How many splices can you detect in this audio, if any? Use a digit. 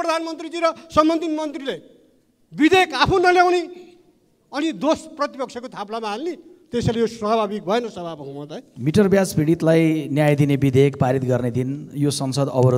1